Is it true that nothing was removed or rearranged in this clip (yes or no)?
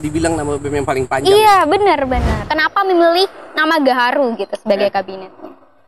no